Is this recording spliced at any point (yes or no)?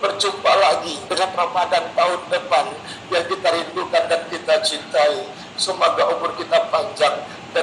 yes